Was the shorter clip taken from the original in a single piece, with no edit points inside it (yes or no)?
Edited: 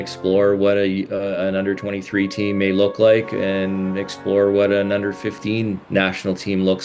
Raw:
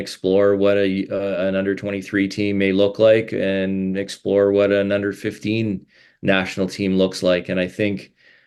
no